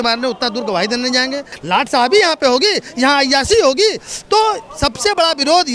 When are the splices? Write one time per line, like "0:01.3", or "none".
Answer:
0:01.5